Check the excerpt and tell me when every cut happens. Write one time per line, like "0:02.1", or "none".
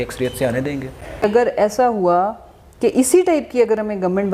0:01.2

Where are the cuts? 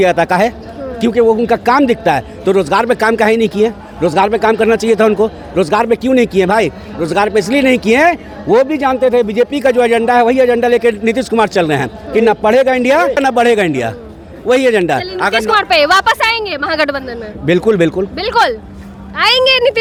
none

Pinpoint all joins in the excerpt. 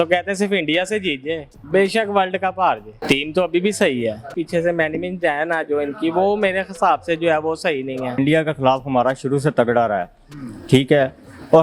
0:02.9
0:04.4
0:08.2

